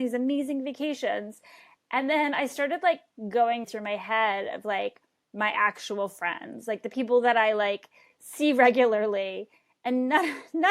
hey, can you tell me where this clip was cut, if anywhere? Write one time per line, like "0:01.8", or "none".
0:03.7